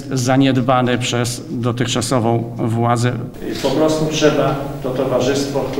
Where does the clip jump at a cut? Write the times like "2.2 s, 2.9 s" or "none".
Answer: 3.3 s